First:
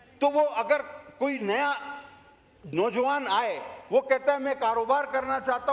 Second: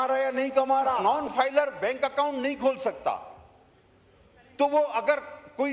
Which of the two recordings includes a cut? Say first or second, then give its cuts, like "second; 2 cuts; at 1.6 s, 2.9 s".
second; 1 cut; at 1.0 s